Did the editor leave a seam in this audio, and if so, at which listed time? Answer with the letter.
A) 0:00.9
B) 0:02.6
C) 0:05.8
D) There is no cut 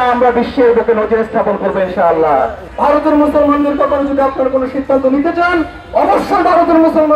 B